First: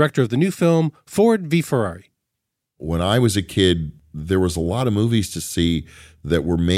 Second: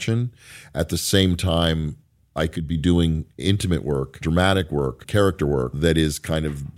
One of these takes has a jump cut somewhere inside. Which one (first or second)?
first